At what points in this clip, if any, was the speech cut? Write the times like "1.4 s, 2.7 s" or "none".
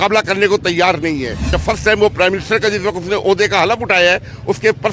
1.5 s

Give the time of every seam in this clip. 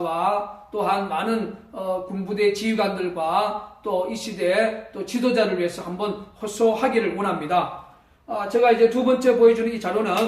2.2 s

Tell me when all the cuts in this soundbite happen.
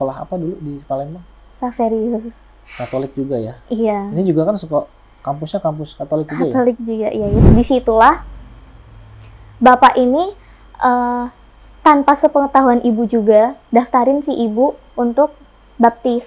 7.4 s

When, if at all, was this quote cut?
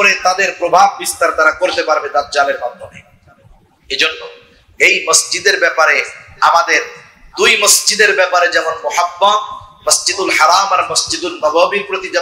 none

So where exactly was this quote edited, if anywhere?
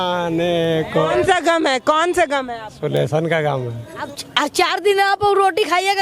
4.1 s

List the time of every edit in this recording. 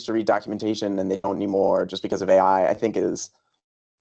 none

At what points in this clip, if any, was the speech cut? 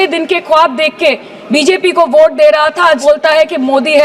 3.0 s

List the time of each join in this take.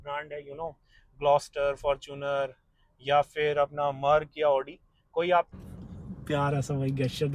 5.5 s

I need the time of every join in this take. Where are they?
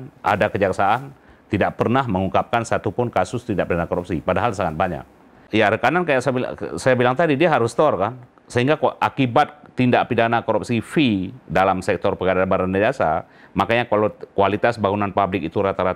5.4 s

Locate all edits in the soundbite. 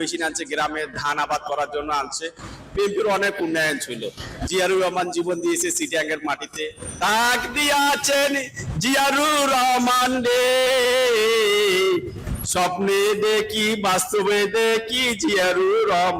6.9 s

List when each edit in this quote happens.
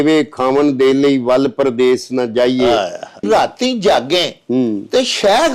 3.2 s

